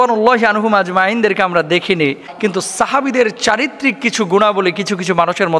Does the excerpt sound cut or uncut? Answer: cut